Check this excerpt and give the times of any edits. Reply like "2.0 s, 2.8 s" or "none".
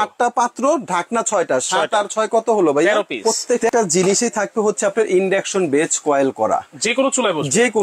3.2 s